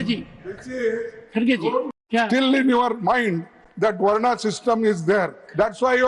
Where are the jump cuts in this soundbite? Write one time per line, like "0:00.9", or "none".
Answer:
0:01.9